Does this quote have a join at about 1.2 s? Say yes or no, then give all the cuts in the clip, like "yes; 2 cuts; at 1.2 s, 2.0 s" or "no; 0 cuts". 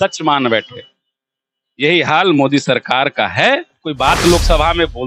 no; 1 cut; at 3.9 s